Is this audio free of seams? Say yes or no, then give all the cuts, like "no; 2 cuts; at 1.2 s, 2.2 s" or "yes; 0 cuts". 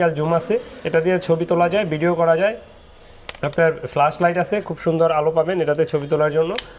yes; 0 cuts